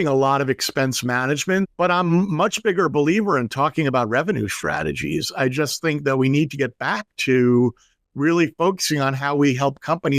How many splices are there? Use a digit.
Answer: 1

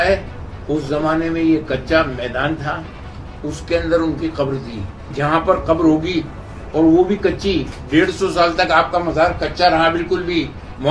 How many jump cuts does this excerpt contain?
1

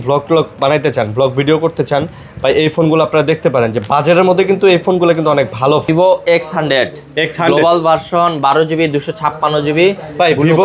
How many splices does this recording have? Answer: 1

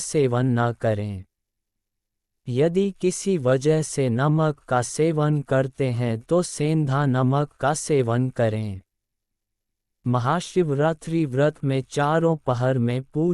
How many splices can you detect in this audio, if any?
1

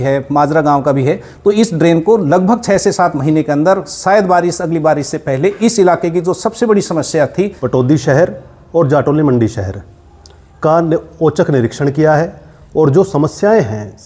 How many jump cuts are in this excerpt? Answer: 1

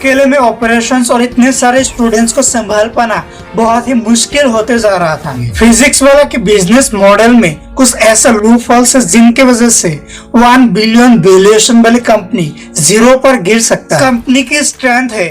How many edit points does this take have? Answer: 2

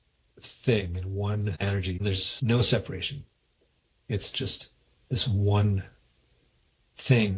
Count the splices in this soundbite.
1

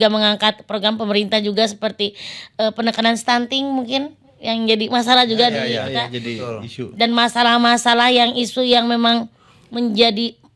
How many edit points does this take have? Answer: 0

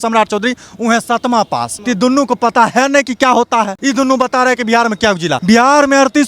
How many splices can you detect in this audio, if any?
3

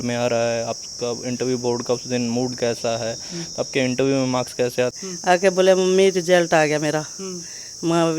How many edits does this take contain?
1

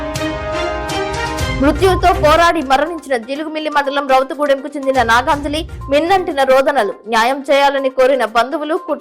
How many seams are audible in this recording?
1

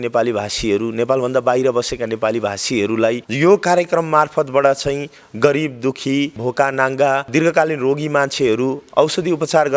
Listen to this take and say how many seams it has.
3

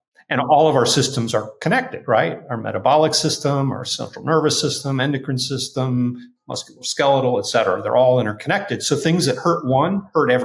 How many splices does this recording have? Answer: 0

